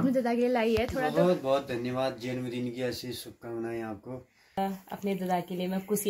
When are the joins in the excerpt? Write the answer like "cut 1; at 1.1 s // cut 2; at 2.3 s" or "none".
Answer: cut 1; at 4.6 s